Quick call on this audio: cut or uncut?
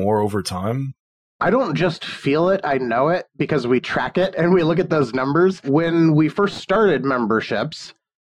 cut